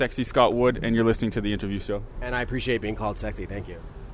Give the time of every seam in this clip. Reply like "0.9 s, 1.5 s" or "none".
2.1 s